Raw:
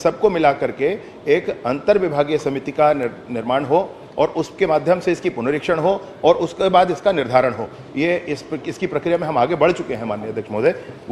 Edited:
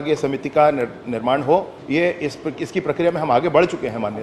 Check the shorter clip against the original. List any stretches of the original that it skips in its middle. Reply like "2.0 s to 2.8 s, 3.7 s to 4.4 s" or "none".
4.0 s to 7.8 s